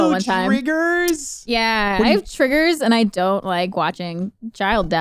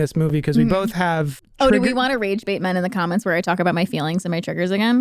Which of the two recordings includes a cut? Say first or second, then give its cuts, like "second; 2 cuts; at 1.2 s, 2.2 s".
second; 1 cut; at 1.4 s